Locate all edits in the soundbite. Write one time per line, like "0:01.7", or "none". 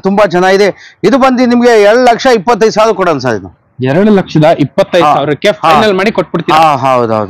none